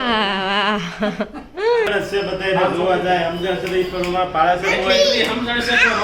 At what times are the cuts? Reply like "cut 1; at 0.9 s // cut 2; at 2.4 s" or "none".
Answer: cut 1; at 1.9 s